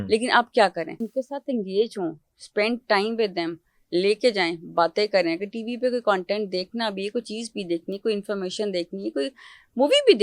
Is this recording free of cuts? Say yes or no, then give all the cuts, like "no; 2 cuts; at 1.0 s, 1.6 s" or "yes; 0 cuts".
no; 1 cut; at 1.0 s